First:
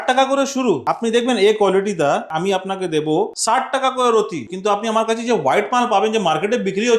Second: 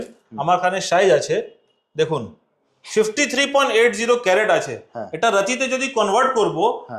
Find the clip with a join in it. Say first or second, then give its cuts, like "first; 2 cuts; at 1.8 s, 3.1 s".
first; 4 cuts; at 0.9 s, 2.3 s, 3.4 s, 4.5 s